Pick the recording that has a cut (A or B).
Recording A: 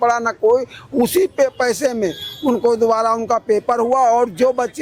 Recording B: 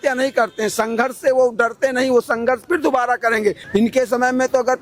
B